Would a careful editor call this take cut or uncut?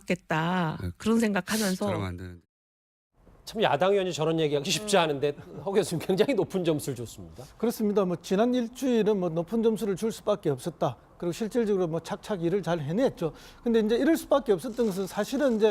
cut